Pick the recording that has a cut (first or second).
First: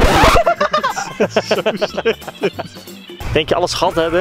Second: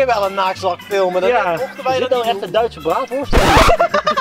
first